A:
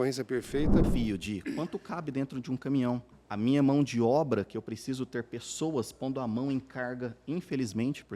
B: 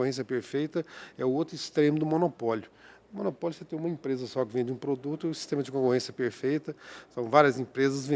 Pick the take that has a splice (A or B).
A